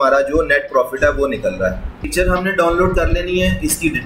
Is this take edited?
yes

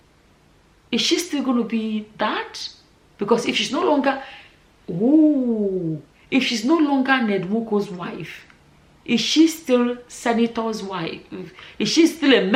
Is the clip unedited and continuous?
yes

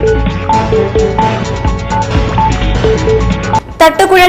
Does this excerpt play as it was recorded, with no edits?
no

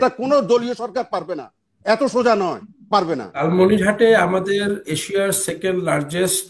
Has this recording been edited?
yes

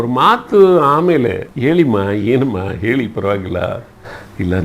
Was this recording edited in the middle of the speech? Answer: yes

